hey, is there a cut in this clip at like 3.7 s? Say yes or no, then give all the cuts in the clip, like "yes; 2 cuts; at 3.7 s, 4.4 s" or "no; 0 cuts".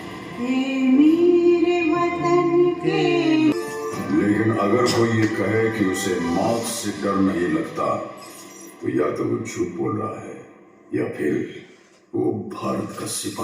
yes; 1 cut; at 3.7 s